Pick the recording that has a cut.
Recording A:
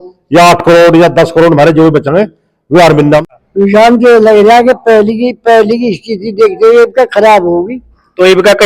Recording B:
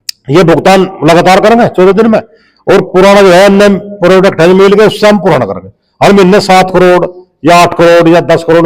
A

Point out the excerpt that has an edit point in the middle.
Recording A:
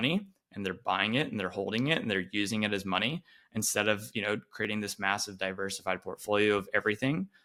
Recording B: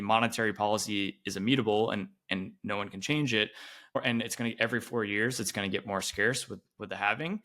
B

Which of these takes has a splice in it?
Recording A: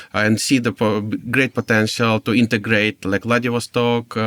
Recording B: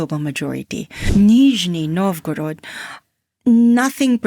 B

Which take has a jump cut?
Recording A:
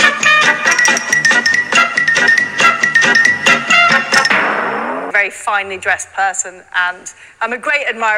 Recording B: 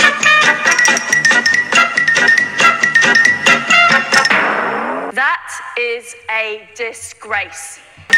A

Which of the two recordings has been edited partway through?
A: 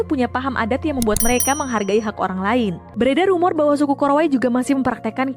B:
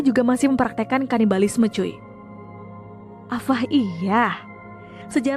A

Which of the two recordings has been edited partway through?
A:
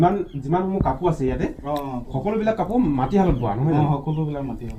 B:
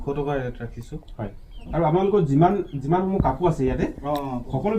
B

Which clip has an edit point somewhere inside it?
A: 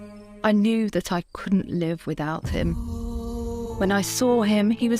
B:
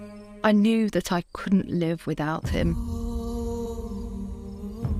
A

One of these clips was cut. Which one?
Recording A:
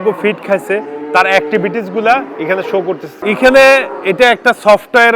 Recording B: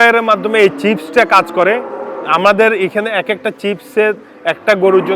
A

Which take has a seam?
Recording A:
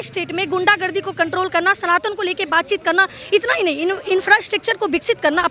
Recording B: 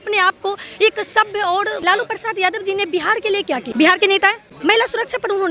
B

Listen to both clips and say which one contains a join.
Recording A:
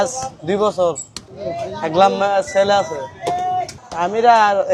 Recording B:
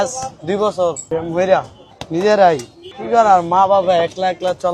B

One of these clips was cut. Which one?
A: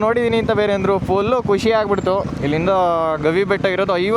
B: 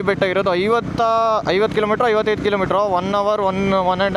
A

